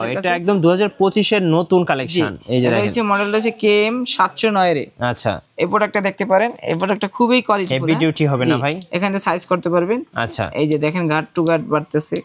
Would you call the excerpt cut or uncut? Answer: uncut